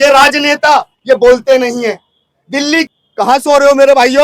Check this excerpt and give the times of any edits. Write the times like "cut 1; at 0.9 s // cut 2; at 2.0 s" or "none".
cut 1; at 2.9 s